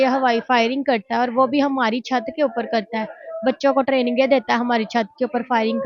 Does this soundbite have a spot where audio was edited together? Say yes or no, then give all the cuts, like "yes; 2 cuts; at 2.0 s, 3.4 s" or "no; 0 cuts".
no; 0 cuts